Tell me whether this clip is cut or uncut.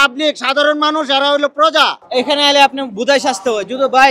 cut